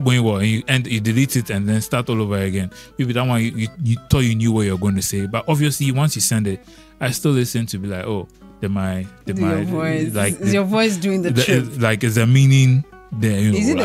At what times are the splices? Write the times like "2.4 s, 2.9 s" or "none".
none